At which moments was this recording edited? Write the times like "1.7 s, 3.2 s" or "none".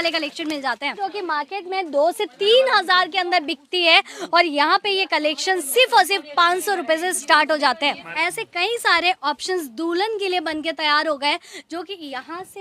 1.0 s, 8.1 s